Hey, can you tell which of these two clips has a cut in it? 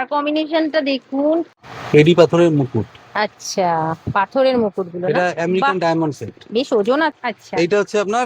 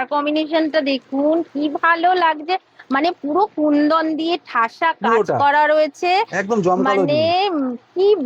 first; 2 cuts; at 1.5 s, 7.2 s

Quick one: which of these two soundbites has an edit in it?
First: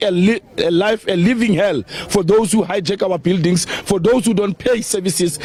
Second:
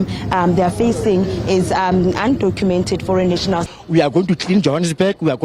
second; 1 cut; at 3.7 s

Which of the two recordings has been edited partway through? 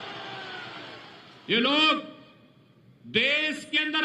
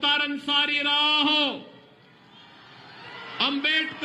first; 1 cut; at 1.5 s

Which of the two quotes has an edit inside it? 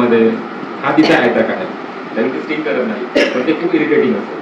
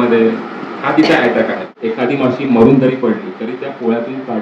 second; 1 cut; at 1.7 s

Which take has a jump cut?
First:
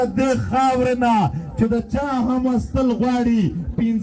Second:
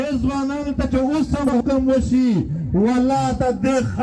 second; 1 cut; at 1.6 s

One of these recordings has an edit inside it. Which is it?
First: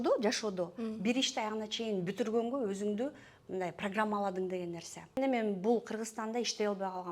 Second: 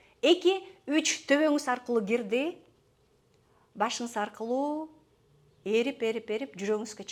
first; 1 cut; at 5.2 s

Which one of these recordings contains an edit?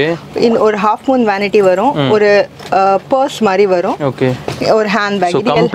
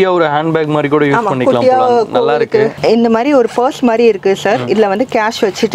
second; 1 cut; at 2.8 s

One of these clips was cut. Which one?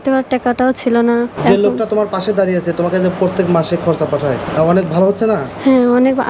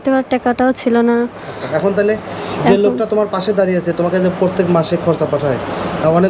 first; 2 cuts; at 1.3 s, 4.5 s

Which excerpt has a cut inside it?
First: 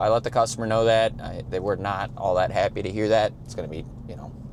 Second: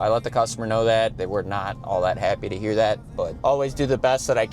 second; 2 cuts; at 1.2 s, 3.2 s

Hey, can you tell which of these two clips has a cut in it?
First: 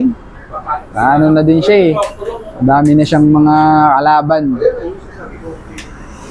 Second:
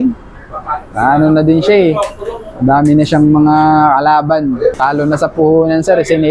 second; 1 cut; at 4.8 s

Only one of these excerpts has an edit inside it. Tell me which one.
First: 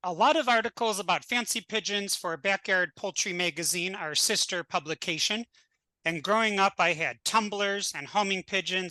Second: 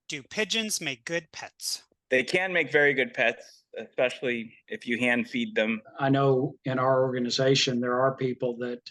second; 2 cuts; at 1.9 s, 5.9 s

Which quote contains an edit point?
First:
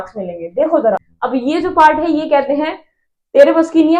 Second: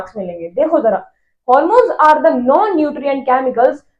first; 1 cut; at 1.1 s

